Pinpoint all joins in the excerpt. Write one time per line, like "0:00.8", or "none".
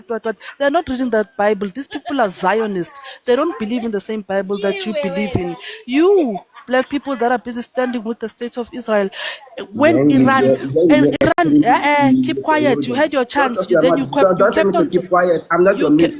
none